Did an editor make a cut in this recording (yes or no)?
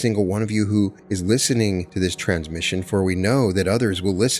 yes